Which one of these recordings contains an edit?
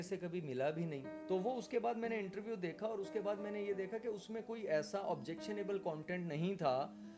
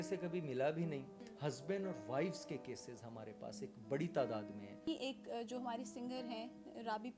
second; 2 cuts; at 1.1 s, 4.9 s

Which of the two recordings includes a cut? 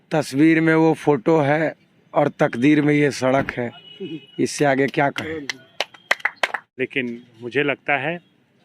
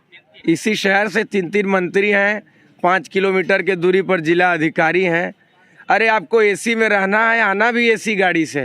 first; 1 cut; at 6.6 s

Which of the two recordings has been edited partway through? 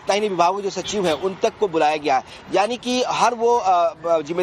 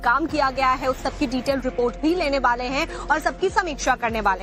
first; 1 cut; at 2.7 s

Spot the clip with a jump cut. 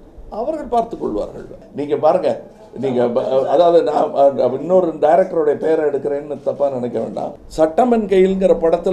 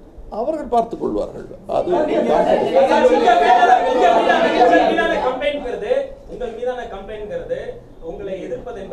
first; 2 cuts; at 1.6 s, 7.4 s

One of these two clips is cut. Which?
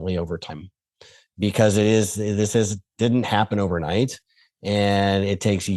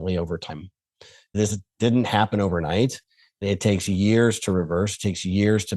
second; 2 cuts; at 1.4 s, 3.4 s

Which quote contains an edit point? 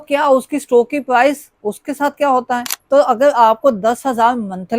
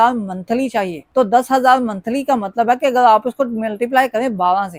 first; 1 cut; at 2.7 s

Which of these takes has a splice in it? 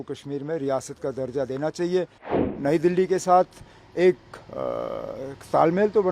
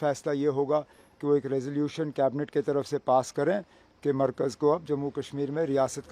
first; 1 cut; at 2.4 s

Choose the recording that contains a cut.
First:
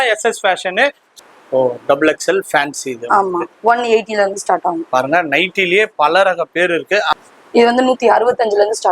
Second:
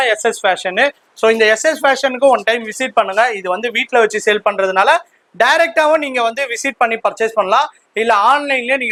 first; 2 cuts; at 1.0 s, 7.1 s

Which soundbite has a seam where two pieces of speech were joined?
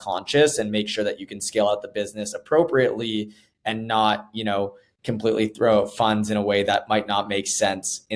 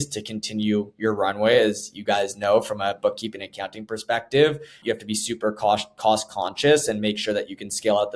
second; 1 cut; at 4.8 s

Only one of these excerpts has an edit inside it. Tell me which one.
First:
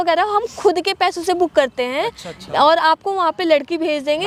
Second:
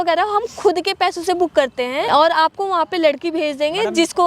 second; 1 cut; at 2.1 s

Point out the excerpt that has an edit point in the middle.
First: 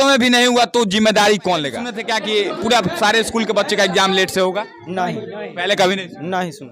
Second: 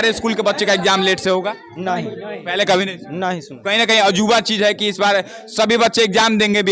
first; 1 cut; at 2.0 s

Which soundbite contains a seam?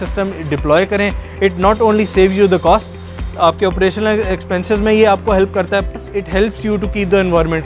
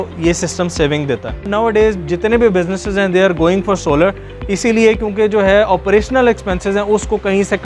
second; 1 cut; at 1.5 s

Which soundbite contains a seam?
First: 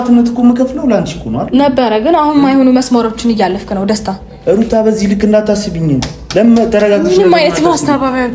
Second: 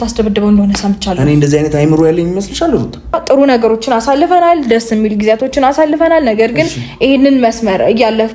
second; 1 cut; at 3.2 s

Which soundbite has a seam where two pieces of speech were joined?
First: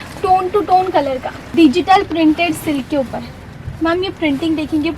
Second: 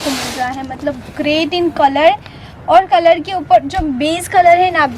first; 1 cut; at 1.5 s

